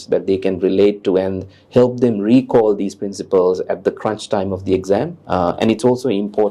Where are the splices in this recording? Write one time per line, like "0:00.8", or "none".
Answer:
0:05.2